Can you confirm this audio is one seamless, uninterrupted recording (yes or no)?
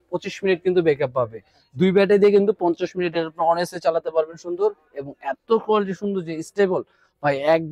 yes